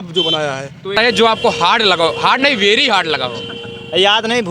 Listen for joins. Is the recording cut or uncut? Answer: cut